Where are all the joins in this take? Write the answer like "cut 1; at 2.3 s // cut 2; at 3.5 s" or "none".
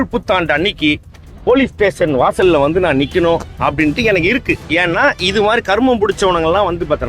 cut 1; at 4.6 s